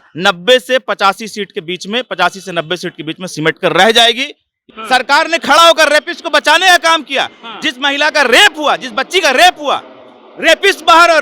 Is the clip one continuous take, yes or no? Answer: no